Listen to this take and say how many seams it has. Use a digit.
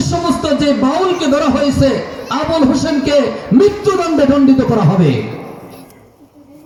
0